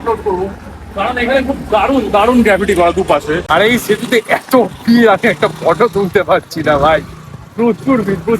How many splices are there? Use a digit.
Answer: 1